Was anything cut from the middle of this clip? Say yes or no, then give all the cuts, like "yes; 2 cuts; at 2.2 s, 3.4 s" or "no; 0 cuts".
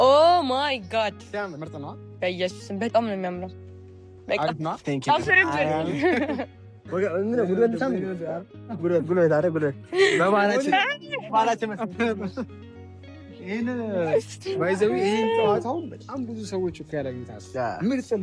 no; 0 cuts